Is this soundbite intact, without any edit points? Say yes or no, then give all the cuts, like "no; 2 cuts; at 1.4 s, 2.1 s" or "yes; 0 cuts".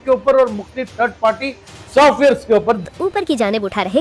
no; 1 cut; at 2.9 s